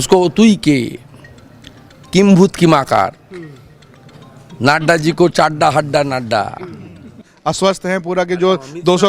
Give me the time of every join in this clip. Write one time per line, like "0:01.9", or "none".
0:07.3